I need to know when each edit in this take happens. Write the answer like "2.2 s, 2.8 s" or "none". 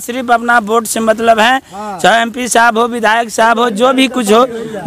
none